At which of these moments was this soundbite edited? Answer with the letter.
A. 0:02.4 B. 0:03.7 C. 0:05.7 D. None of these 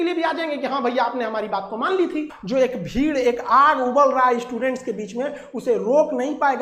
D